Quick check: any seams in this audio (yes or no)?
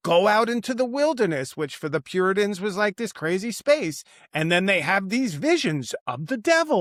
no